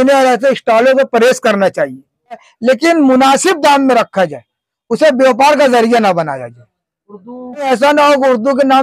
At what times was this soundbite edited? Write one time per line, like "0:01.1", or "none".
0:02.5
0:07.6